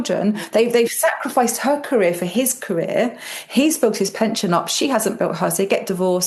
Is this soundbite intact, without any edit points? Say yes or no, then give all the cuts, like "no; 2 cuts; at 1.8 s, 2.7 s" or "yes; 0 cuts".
yes; 0 cuts